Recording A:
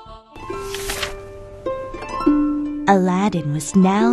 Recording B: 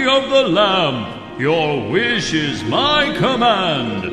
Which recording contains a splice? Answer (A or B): A